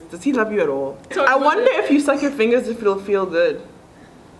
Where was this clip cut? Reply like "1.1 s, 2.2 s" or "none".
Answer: 1.0 s